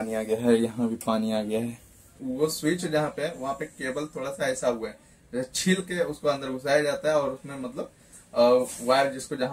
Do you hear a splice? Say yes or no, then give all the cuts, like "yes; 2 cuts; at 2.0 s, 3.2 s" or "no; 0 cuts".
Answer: yes; 1 cut; at 2.1 s